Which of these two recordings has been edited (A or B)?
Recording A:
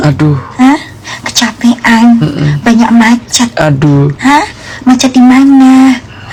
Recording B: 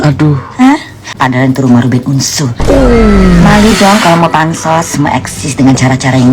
B